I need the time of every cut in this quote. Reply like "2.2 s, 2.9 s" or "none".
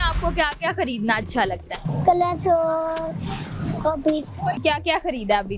1.9 s, 4.6 s